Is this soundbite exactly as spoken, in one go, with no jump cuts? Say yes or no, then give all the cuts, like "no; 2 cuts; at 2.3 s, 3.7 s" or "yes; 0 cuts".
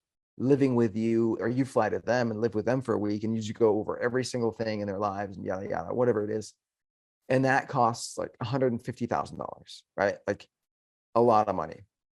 no; 1 cut; at 1.4 s